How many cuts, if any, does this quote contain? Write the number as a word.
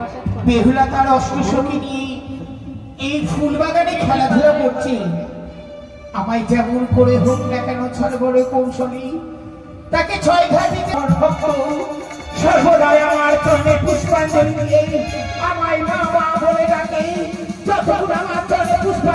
one